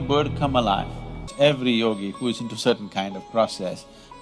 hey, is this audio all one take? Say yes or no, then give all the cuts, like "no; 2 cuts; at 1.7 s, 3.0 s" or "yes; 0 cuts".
no; 1 cut; at 1.3 s